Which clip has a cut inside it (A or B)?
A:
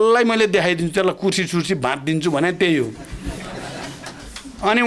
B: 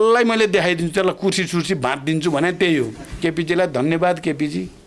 B